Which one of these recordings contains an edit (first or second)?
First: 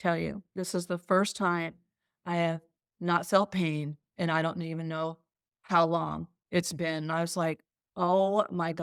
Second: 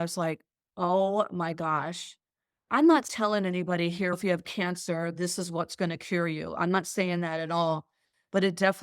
second